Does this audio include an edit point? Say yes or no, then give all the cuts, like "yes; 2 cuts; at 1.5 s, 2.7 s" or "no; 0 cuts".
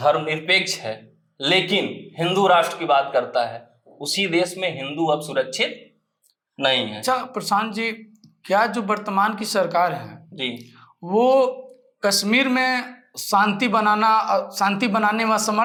no; 0 cuts